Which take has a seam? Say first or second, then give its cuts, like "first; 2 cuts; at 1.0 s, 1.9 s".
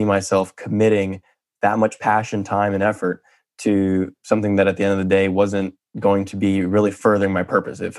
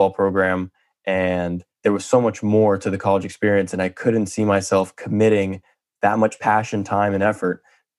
second; 1 cut; at 1.7 s